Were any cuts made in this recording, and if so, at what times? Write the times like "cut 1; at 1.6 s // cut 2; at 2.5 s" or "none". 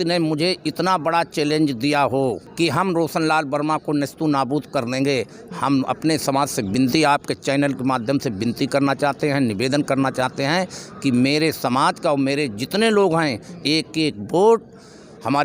cut 1; at 2.5 s